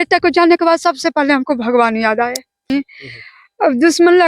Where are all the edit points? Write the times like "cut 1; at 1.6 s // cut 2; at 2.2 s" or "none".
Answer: cut 1; at 2.7 s